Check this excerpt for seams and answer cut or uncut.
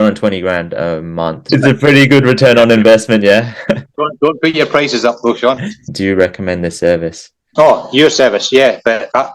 cut